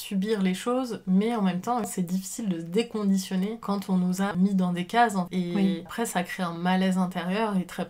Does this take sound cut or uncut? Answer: cut